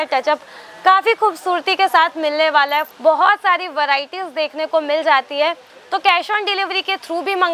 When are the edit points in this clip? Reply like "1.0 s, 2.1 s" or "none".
2.9 s